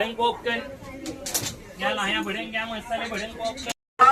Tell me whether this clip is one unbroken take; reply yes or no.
yes